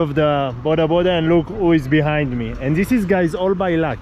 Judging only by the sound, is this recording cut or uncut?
uncut